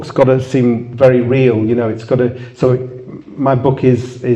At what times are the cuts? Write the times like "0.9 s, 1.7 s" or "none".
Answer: none